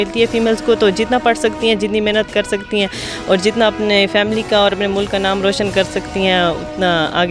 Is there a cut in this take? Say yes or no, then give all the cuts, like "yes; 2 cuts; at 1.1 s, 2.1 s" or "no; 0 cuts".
no; 0 cuts